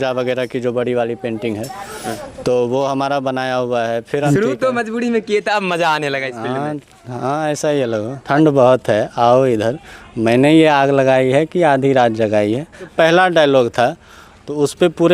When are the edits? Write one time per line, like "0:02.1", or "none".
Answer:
0:04.3
0:08.2
0:12.9